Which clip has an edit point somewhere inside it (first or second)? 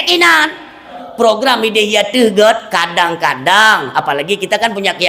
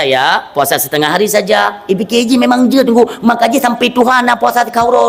first